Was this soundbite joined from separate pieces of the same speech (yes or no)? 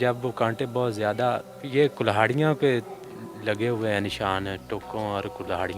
yes